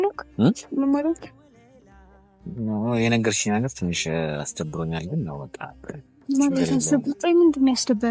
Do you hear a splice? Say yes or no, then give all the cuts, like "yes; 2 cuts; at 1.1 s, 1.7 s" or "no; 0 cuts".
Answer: no; 0 cuts